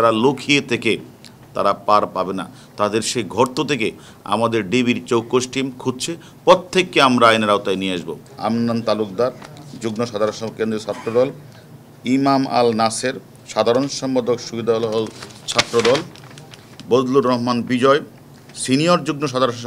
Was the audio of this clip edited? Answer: yes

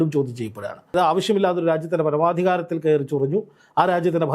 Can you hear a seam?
yes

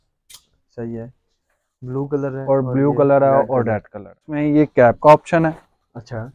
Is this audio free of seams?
no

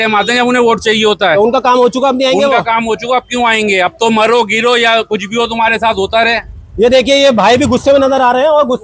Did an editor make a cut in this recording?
no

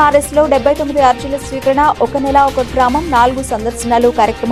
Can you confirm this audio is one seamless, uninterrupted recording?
yes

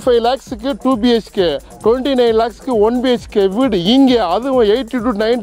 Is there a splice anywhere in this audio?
no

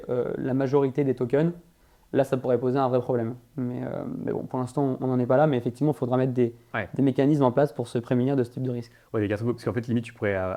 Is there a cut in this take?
no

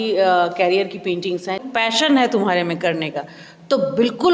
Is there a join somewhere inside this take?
yes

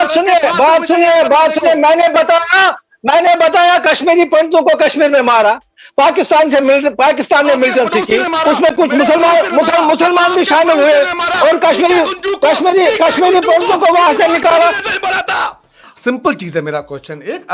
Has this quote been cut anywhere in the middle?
yes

